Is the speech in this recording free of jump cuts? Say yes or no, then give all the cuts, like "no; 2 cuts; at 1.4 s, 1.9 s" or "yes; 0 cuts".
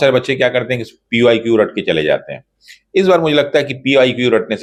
yes; 0 cuts